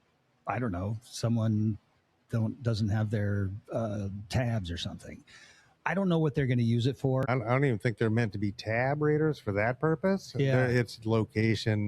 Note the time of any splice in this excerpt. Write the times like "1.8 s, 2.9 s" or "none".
7.3 s